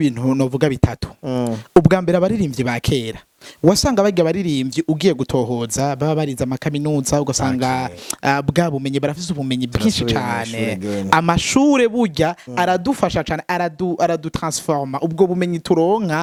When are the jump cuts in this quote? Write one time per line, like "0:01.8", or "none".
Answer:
none